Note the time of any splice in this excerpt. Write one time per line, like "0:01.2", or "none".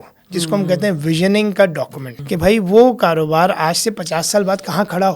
0:02.1